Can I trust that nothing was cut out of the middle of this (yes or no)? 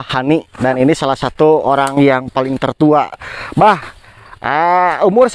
yes